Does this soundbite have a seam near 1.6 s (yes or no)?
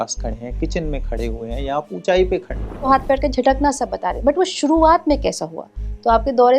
no